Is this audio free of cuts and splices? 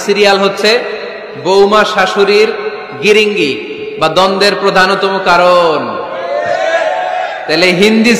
yes; 0 cuts

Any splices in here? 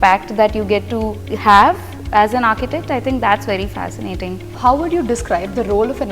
yes; 2 cuts; at 1.2 s, 4.5 s

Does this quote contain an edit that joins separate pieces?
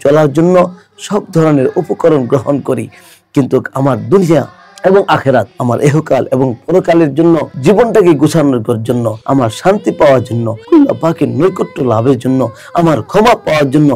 yes; 4 cuts; at 5.5 s, 7.5 s, 9.1 s, 10.5 s

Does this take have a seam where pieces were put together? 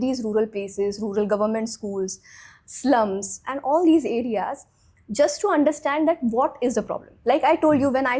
no; 0 cuts

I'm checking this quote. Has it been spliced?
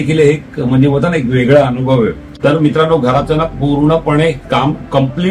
yes; 1 cut; at 2.3 s

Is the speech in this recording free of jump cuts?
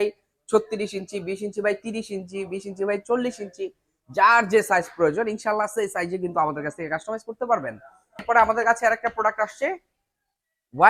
no; 1 cut; at 8.1 s

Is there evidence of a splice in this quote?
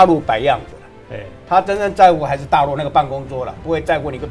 no; 0 cuts

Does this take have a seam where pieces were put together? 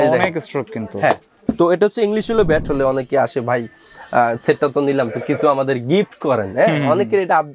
yes; 2 cuts; at 1.5 s, 2.7 s

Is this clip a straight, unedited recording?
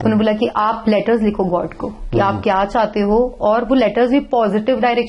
yes; 0 cuts

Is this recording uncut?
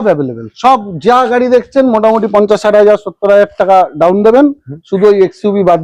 yes; 0 cuts

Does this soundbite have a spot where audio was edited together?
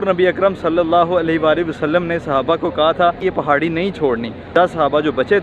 yes; 2 cuts; at 3.2 s, 4.5 s

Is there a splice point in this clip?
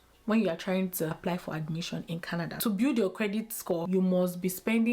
yes; 3 cuts; at 1.2 s, 2.5 s, 3.8 s

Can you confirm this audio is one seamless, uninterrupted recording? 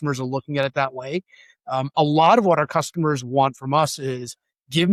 yes; 0 cuts

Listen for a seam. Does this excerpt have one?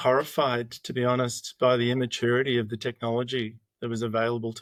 no; 0 cuts

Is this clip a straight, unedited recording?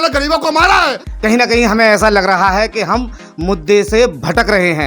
no; 1 cut; at 1.0 s

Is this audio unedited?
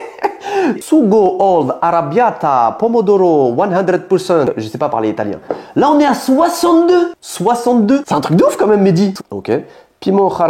no; 3 cuts; at 0.8 s, 5.6 s, 9.2 s

